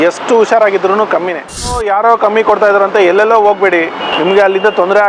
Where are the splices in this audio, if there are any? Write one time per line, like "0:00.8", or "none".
0:01.7
0:04.1

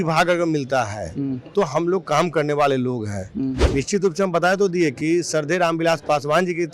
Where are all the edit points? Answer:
0:03.6

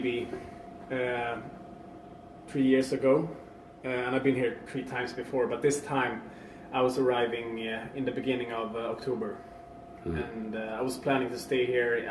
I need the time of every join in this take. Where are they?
0:08.2

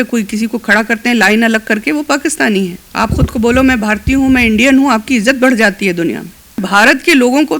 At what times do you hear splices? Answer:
0:02.8
0:06.6

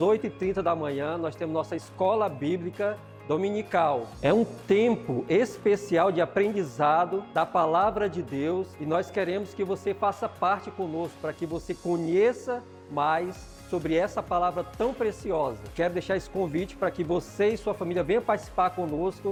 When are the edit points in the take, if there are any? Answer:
none

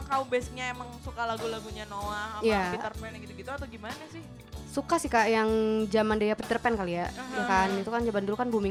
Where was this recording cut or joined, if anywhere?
none

